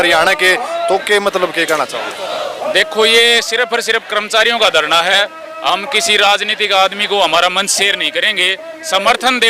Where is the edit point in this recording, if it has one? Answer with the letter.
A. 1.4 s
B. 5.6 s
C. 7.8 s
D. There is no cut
D